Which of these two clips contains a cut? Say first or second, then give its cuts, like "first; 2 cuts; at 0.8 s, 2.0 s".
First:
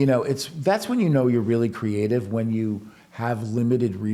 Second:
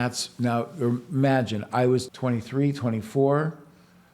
second; 1 cut; at 2.1 s